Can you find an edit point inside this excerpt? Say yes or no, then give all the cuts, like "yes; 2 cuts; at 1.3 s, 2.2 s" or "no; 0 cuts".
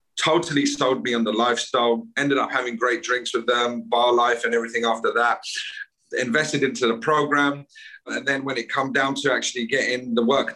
yes; 1 cut; at 8.1 s